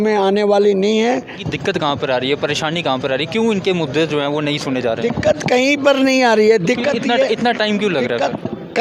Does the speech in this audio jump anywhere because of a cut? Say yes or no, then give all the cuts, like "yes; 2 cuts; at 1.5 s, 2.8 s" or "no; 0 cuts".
yes; 1 cut; at 1.5 s